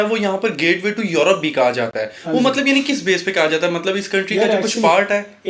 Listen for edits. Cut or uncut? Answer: uncut